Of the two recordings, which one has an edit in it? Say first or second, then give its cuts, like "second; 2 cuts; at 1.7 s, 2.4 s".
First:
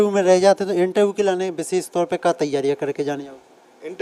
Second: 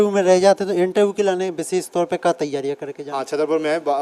second; 1 cut; at 2.9 s